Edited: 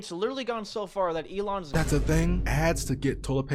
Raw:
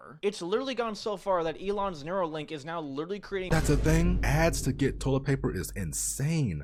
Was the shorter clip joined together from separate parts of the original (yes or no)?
yes